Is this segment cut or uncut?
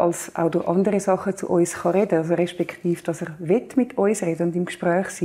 uncut